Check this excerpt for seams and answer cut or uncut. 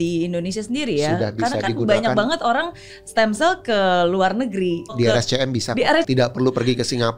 cut